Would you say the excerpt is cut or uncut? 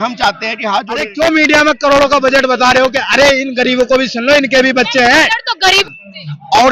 cut